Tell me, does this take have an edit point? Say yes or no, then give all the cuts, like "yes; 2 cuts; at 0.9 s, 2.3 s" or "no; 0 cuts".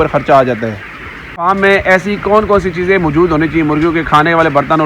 yes; 1 cut; at 1.5 s